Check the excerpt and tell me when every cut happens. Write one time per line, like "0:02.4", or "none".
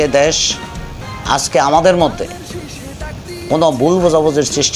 none

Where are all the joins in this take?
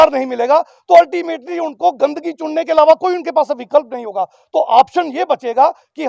none

